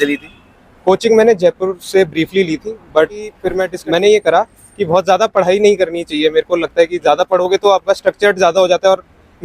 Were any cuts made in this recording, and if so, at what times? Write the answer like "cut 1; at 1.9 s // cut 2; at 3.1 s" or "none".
cut 1; at 3.5 s